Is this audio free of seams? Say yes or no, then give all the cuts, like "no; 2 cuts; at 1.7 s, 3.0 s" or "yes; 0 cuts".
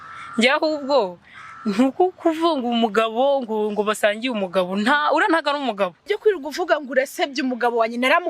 no; 1 cut; at 6.0 s